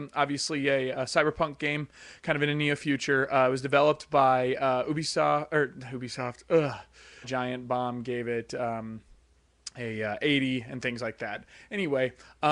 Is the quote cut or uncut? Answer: uncut